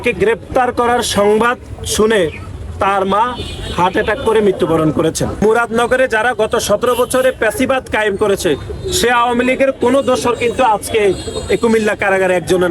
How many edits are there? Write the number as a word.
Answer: one